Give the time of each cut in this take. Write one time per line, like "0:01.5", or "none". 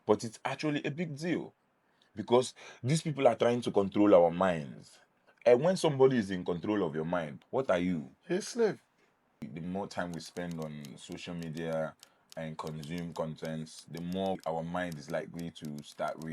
0:07.4
0:08.1
0:09.4
0:14.4